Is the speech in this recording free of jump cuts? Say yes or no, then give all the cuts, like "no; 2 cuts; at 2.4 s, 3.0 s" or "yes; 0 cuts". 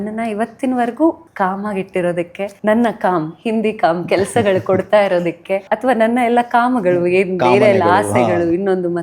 no; 3 cuts; at 1.3 s, 2.4 s, 5.6 s